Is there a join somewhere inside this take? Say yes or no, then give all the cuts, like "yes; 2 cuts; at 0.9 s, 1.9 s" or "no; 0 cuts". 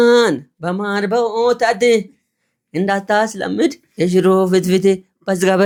no; 0 cuts